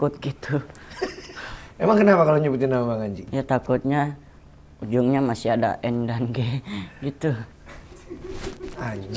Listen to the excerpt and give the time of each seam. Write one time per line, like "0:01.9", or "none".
0:03.3
0:07.5